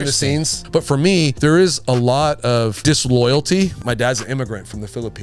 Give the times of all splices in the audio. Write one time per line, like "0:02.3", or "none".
0:01.0
0:02.8
0:03.8